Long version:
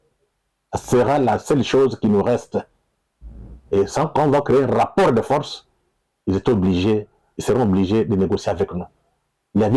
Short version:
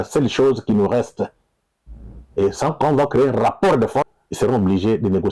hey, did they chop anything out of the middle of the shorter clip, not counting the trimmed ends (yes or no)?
yes